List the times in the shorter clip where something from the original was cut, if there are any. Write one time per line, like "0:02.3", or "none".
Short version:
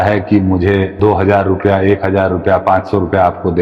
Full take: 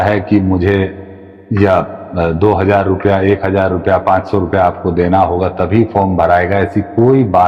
0:01.0